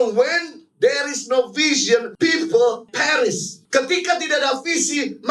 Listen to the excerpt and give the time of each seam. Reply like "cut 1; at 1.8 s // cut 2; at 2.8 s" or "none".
cut 1; at 2.1 s // cut 2; at 3.0 s